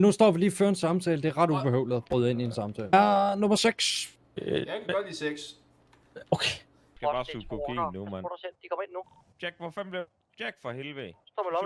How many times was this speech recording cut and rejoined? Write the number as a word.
two